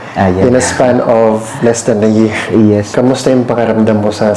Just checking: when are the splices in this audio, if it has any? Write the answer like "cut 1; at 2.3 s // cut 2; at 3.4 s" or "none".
cut 1; at 2.9 s